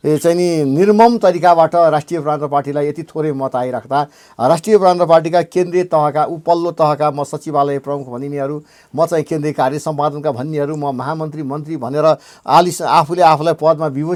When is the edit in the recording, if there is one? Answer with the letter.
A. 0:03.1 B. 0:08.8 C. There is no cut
C